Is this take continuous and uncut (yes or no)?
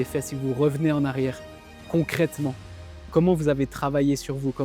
yes